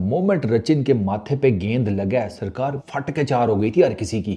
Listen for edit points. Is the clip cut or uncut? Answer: cut